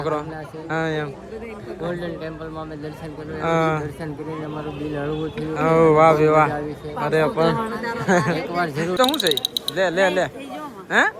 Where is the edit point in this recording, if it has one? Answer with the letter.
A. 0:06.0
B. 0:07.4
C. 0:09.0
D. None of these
C